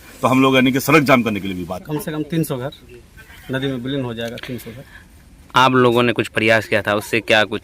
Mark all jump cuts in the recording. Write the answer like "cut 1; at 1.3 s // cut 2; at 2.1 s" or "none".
cut 1; at 1.8 s